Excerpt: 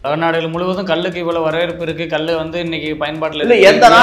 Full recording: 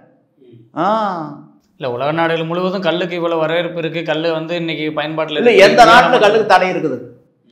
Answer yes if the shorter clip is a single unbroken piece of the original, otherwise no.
yes